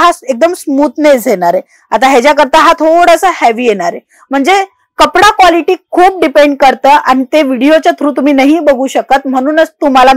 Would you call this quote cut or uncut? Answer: uncut